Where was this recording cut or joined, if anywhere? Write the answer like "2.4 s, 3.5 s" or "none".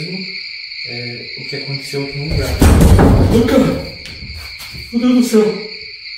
none